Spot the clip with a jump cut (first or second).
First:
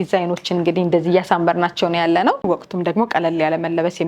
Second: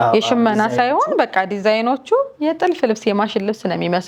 first